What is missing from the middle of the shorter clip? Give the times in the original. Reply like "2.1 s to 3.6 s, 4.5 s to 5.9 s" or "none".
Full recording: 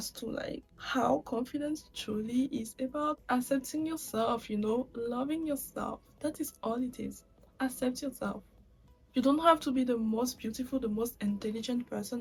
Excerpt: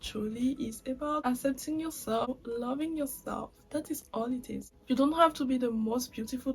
3.1 s to 3.3 s, 4.3 s to 4.8 s, 7.2 s to 9.0 s